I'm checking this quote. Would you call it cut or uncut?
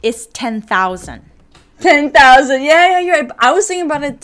uncut